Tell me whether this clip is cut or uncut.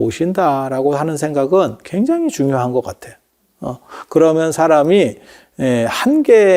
uncut